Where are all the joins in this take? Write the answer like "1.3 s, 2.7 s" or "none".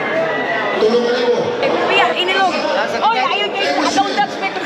2.1 s